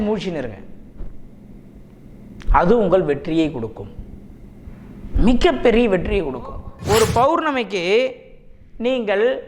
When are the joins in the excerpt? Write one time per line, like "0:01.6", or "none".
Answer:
0:06.7